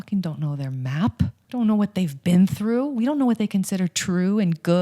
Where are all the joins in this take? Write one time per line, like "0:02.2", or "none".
0:01.4